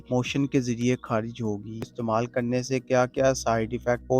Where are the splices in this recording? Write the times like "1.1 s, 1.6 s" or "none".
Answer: 1.9 s